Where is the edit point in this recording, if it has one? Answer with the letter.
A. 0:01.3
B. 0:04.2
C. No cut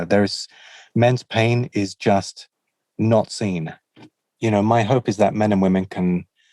B